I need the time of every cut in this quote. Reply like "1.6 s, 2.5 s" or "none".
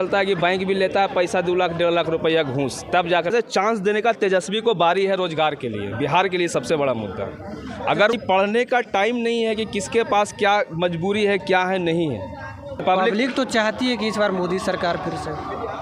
3.3 s, 8.1 s, 12.8 s